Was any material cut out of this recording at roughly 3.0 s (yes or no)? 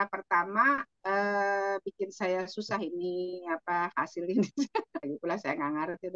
no